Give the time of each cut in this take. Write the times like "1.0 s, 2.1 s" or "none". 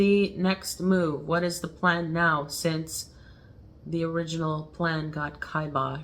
none